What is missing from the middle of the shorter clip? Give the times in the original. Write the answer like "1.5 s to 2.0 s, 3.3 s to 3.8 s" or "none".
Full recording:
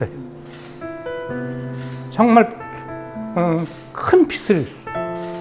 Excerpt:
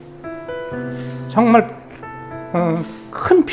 1.9 s to 2.1 s